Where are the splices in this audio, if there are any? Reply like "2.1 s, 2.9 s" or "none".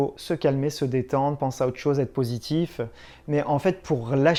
none